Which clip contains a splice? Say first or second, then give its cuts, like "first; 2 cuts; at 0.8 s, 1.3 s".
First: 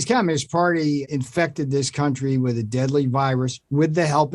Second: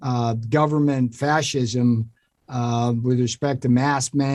first; 1 cut; at 1.1 s